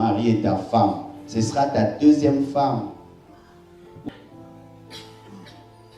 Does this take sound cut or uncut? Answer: cut